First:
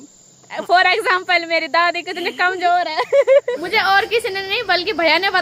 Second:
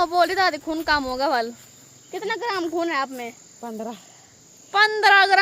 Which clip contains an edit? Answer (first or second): first